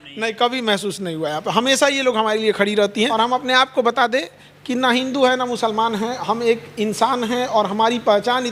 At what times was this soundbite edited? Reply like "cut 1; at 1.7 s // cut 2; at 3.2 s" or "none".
cut 1; at 3.1 s